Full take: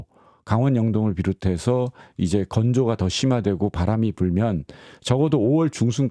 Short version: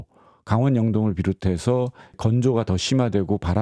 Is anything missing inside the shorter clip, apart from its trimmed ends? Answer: yes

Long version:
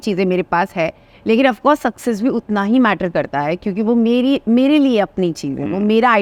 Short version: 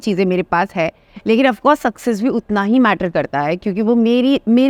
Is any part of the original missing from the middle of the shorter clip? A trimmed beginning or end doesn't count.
no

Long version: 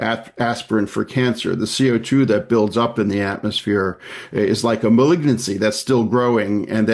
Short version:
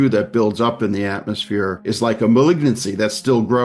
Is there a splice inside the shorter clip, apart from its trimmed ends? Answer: yes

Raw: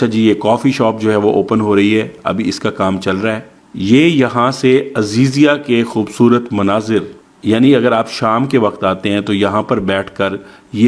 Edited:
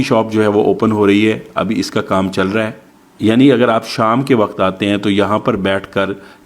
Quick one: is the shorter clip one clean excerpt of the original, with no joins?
no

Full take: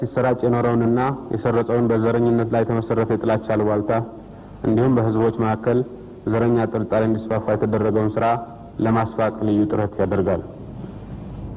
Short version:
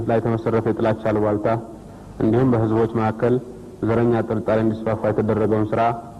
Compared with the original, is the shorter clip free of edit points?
yes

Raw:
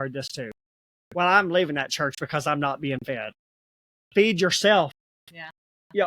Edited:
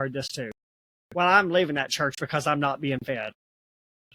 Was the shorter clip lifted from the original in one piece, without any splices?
yes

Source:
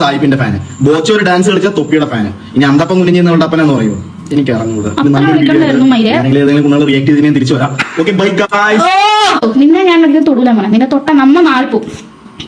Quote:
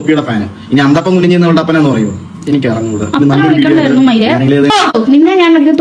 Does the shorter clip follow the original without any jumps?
no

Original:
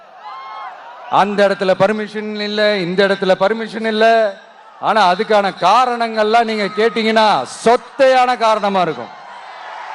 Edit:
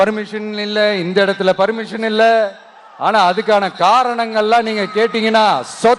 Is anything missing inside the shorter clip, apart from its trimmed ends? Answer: no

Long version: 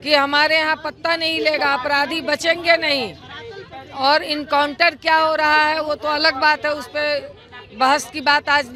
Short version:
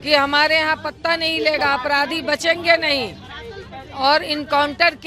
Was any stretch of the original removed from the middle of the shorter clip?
no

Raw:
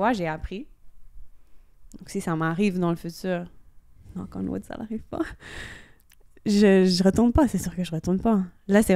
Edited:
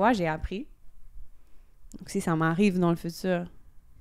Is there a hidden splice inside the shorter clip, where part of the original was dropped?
no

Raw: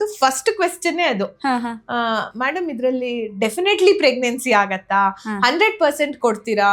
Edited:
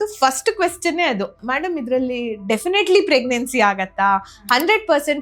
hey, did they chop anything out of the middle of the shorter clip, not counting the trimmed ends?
yes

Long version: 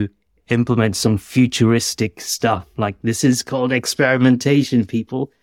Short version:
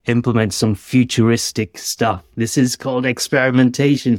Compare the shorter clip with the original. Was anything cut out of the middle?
yes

